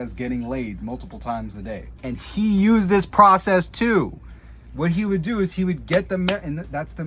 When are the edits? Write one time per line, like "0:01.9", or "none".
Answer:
none